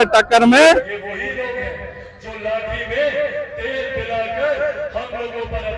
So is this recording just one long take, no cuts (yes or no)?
no